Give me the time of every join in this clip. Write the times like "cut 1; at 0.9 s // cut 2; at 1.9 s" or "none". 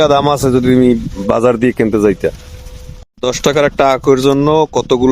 cut 1; at 3.1 s